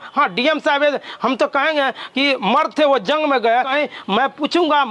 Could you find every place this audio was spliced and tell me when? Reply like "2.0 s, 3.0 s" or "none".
3.6 s